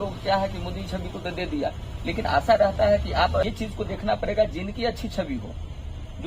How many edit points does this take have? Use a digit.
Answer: 1